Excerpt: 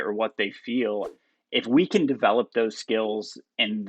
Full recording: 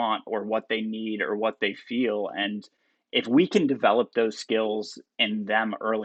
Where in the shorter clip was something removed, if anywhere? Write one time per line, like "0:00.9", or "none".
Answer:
0:01.1